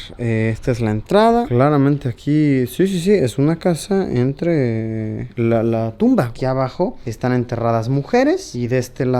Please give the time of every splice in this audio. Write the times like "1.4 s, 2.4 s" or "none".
1.5 s, 6.3 s